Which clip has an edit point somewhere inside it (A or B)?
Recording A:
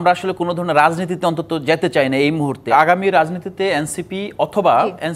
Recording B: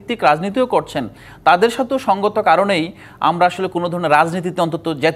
A